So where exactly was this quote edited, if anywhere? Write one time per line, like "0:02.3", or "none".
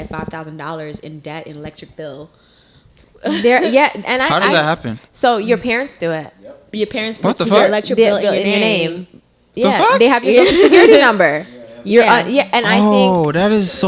none